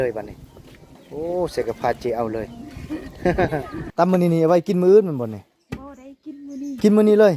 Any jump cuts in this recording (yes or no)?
yes